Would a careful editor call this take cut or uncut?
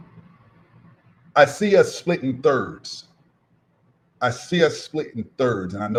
uncut